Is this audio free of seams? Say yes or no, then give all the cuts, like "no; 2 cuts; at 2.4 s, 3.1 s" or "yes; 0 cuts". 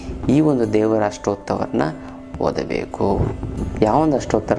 no; 1 cut; at 3.6 s